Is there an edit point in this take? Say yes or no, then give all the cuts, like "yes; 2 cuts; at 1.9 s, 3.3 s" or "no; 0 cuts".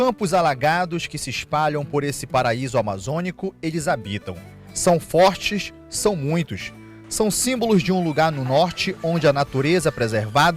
no; 0 cuts